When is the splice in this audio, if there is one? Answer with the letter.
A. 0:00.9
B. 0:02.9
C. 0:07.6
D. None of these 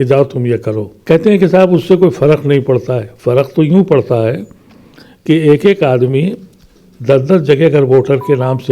A